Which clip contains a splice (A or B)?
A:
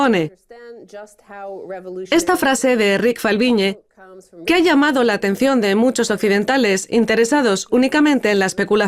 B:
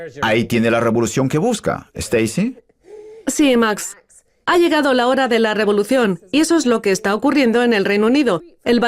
B